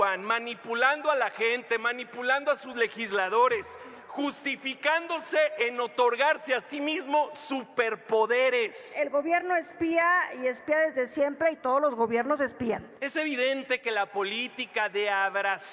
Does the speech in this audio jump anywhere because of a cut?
yes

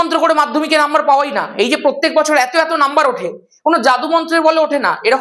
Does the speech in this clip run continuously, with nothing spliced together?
yes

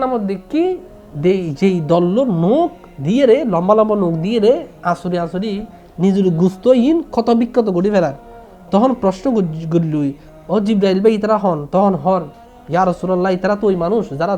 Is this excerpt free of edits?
no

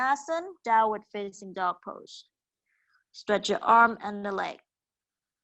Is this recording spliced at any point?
no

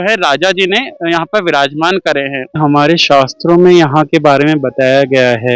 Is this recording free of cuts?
no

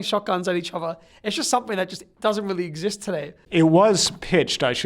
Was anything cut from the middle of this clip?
yes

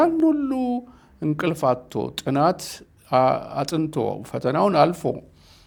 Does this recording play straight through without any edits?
yes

